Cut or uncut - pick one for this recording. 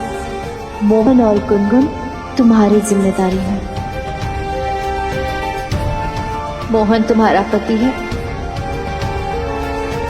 cut